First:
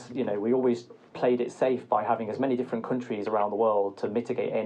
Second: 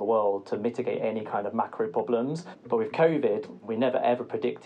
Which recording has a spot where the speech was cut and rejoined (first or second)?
second